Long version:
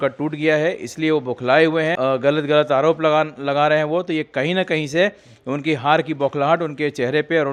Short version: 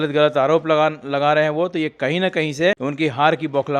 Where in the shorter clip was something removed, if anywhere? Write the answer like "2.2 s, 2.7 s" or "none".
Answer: 2.8 s

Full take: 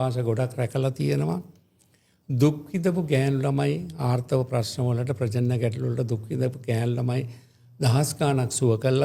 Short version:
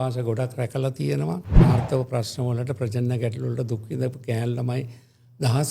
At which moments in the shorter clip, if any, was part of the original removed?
1.5 s

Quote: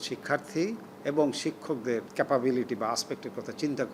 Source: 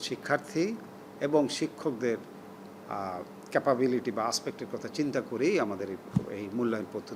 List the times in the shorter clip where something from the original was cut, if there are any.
0.9 s, 2.1 s

